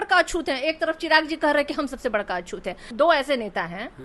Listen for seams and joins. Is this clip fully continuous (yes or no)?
no